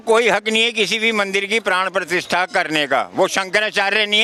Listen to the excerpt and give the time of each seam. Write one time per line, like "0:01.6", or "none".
none